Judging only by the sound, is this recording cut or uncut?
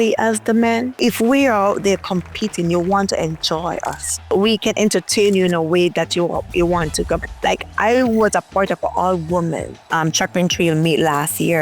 uncut